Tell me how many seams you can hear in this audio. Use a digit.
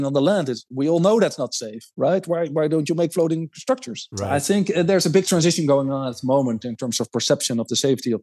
0